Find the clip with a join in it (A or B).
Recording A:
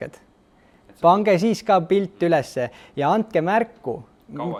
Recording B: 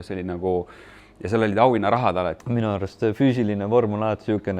B